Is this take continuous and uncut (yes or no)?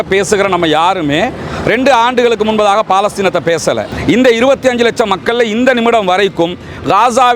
no